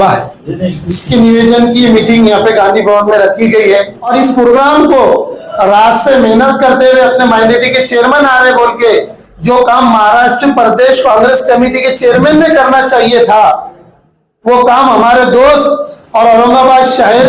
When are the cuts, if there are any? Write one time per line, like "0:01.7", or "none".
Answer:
0:04.0